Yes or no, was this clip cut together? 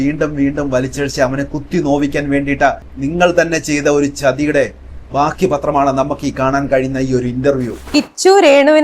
no